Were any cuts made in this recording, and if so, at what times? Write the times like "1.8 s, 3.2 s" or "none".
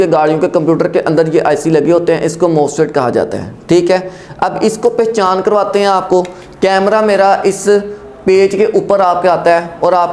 none